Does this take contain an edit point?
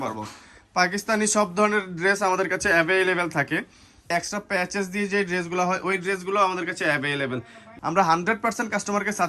yes; 2 cuts; at 4.1 s, 7.6 s

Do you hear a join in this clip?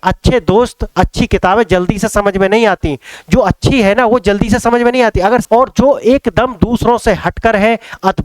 yes; 1 cut; at 5.4 s

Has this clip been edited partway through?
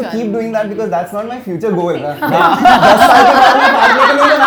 no; 0 cuts

